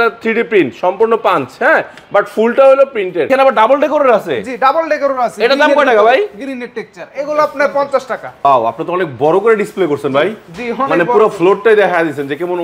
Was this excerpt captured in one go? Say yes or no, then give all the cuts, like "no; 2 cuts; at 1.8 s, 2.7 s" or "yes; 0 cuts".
no; 2 cuts; at 3.3 s, 8.4 s